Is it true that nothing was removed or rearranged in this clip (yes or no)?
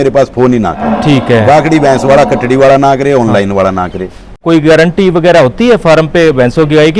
no